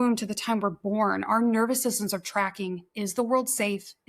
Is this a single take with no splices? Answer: yes; 0 cuts

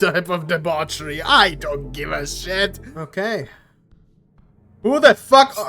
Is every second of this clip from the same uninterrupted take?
no; 1 cut; at 2.8 s

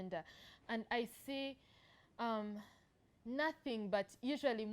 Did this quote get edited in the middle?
no; 0 cuts

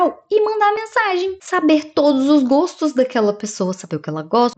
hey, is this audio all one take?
yes; 0 cuts

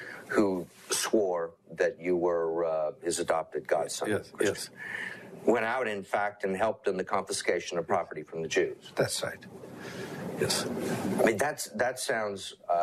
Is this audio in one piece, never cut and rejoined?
yes; 0 cuts

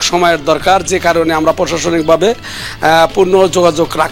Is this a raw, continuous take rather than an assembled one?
yes; 0 cuts

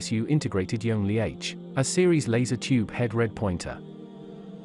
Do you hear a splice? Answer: yes; 1 cut; at 3.8 s

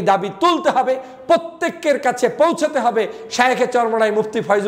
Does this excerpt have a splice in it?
no; 0 cuts

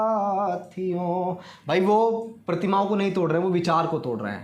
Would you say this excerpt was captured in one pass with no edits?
yes; 0 cuts

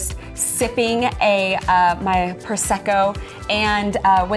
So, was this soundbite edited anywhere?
no; 0 cuts

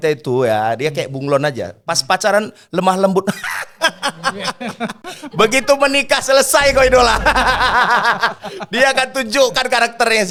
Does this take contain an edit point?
no; 0 cuts

